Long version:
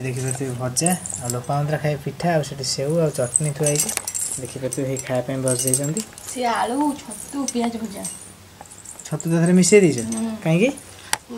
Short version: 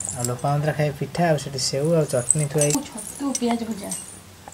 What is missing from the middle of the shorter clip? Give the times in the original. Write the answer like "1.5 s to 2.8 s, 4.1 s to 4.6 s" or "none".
3.8 s to 6.9 s